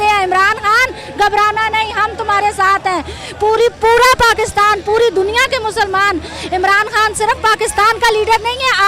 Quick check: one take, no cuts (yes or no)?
yes